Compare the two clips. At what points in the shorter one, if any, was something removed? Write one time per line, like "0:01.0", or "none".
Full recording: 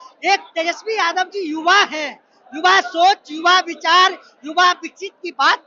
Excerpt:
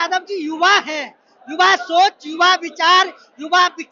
none